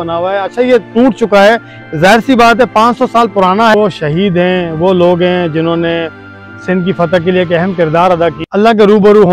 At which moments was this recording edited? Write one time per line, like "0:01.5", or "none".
0:03.7
0:08.4